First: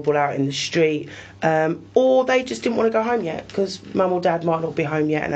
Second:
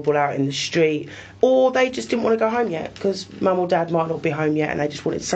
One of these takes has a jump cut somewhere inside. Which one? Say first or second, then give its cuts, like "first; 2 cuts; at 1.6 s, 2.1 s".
second; 1 cut; at 1.3 s